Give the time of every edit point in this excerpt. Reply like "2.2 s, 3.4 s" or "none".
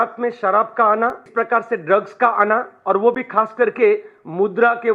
1.2 s